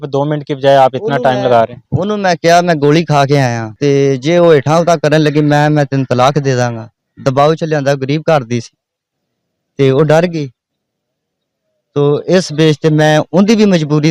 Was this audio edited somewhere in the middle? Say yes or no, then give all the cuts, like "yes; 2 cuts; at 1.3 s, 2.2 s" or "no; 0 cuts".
no; 0 cuts